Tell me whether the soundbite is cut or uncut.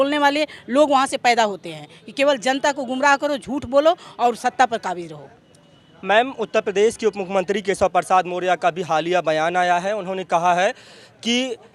uncut